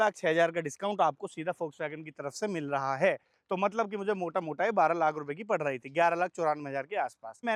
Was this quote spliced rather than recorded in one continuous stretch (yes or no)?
no